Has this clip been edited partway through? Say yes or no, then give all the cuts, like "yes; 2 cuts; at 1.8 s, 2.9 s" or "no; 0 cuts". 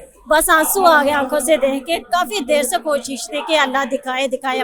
no; 0 cuts